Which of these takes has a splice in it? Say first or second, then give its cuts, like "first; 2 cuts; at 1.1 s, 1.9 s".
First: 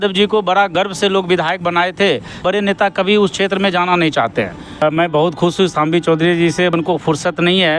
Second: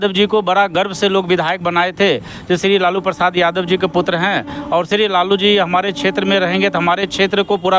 first; 3 cuts; at 2.4 s, 4.8 s, 6.7 s